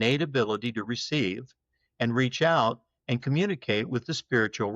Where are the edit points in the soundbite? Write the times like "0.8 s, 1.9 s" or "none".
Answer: none